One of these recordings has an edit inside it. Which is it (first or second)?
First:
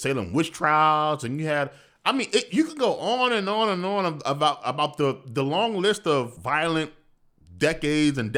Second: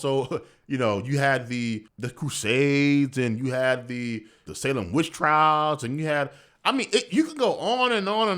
second